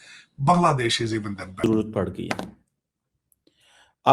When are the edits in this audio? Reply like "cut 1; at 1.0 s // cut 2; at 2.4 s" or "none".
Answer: cut 1; at 1.7 s